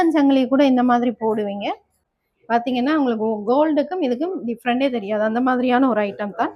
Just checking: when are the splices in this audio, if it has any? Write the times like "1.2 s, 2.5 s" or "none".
2.2 s

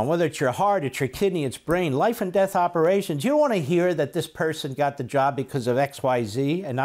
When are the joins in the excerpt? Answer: none

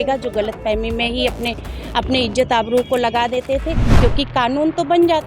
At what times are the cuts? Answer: 3.9 s

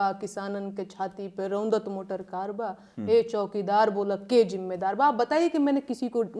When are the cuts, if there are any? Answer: none

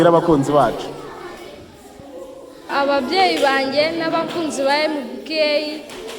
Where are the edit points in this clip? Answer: 2.7 s

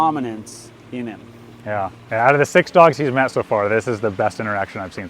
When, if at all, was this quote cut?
2.0 s

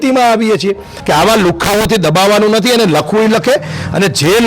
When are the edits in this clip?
0.9 s

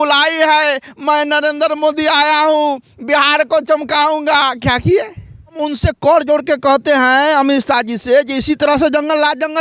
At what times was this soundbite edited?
5.6 s

